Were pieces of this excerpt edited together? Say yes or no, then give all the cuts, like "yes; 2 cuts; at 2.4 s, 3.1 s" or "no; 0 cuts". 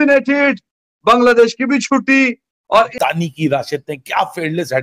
yes; 1 cut; at 2.9 s